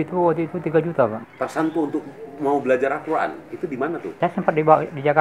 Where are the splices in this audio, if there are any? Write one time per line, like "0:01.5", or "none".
0:01.2
0:04.1